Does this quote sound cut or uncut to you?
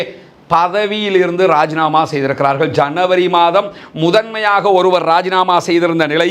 uncut